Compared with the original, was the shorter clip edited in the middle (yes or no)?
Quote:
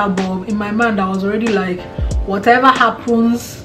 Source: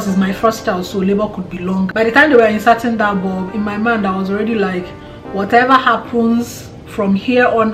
no